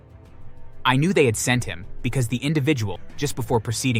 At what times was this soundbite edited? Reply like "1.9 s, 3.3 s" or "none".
3.0 s